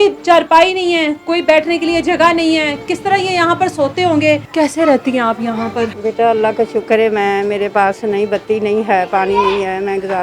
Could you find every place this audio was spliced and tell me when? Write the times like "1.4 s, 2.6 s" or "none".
4.5 s, 6.0 s